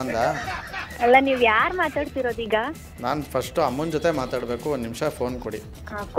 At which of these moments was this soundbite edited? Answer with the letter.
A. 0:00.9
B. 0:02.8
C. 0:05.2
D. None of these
D